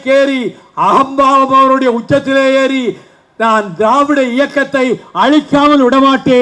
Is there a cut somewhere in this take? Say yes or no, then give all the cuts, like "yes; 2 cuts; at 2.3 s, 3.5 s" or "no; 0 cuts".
no; 0 cuts